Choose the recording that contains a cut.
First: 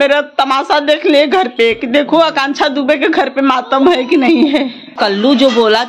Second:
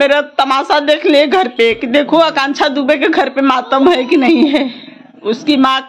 first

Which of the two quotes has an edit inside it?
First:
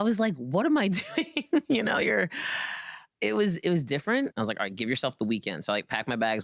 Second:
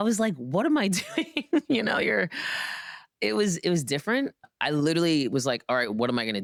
first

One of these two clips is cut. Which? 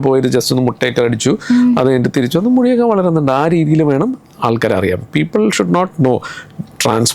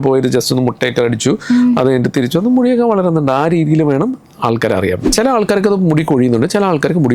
second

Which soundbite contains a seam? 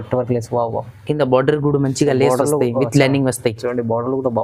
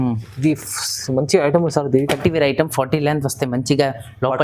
second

